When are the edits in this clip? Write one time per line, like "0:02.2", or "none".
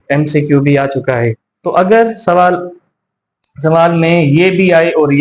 0:01.4